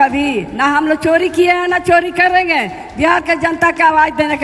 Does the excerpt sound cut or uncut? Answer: uncut